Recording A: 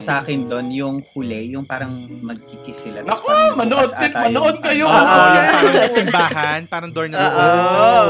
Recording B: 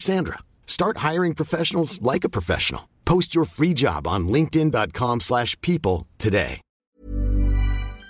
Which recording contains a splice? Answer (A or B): B